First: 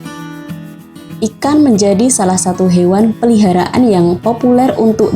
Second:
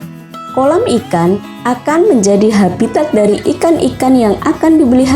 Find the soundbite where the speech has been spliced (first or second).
first